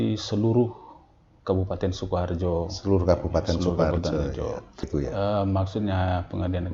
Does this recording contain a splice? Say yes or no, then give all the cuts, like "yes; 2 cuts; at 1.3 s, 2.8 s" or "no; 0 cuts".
yes; 1 cut; at 4.9 s